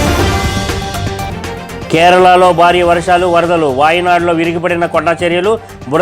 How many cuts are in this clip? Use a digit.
1